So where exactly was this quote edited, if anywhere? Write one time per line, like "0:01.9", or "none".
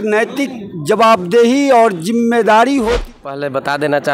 0:03.0